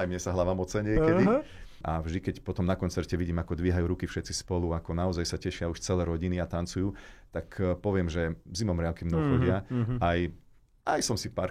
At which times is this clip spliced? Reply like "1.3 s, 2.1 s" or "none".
1.8 s